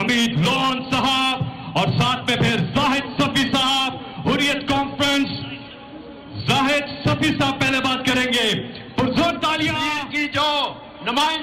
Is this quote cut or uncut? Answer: cut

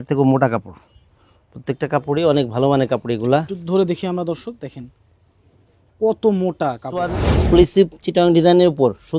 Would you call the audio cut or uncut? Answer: cut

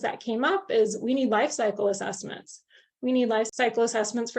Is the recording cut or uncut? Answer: cut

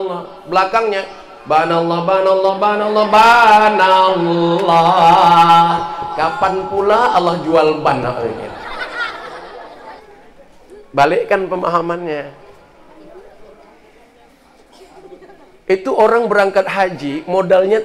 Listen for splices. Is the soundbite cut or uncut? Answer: cut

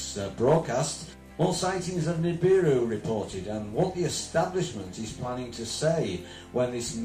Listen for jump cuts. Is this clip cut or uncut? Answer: uncut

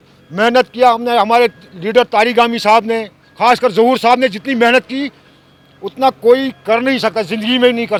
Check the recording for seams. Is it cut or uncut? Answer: uncut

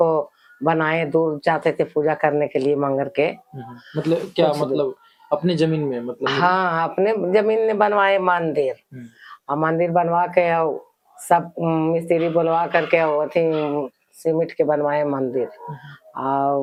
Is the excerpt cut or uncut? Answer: uncut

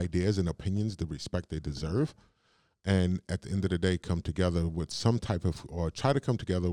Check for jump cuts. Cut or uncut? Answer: uncut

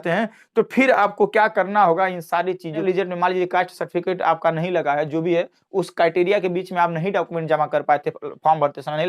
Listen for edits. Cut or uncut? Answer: cut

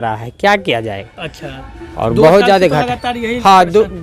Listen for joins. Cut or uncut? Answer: uncut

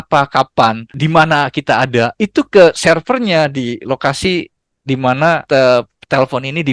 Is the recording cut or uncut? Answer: cut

